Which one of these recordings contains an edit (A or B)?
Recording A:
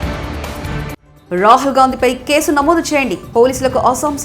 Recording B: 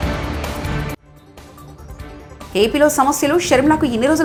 A